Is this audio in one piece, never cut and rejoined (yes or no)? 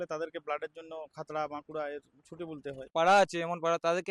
no